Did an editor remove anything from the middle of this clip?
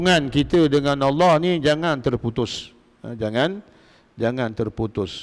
no; 0 cuts

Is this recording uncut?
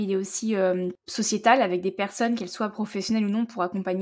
no; 1 cut; at 1.0 s

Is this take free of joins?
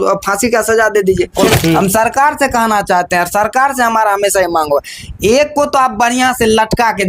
no; 1 cut; at 1.5 s

